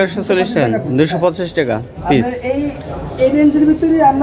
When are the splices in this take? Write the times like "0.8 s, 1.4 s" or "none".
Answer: none